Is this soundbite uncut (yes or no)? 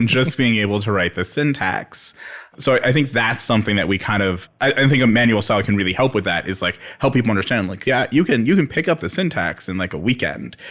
yes